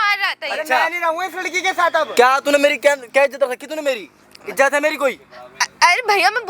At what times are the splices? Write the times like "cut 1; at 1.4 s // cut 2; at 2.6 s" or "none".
cut 1; at 2.1 s